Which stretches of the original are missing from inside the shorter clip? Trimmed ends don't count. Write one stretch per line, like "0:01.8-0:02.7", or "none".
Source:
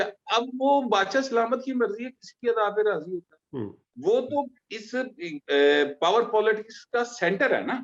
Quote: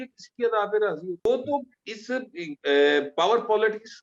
0:03.3-0:04.1

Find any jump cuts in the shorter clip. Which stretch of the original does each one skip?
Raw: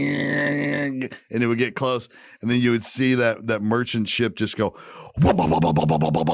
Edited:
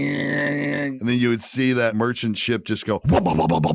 0:00.9-0:02.4
0:03.3-0:03.6
0:04.7-0:05.1

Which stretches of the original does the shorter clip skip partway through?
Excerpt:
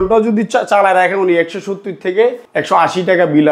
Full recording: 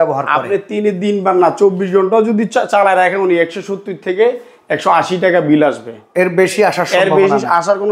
0:04.4-0:04.6

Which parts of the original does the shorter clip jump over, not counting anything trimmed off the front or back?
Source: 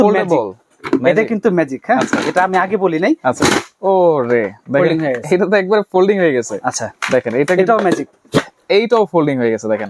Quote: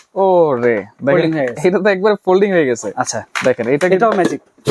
none

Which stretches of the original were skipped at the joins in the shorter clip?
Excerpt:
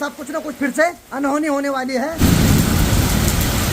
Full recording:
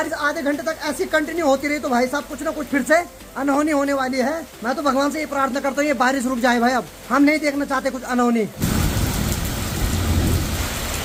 0:03.2-0:03.3
0:04.7-0:08.5

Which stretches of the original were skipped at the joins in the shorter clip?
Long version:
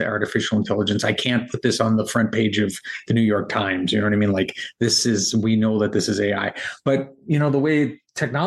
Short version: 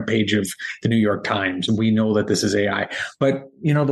0:03.9-0:05.3

